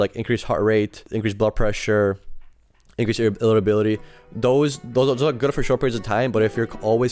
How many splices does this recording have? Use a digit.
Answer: 1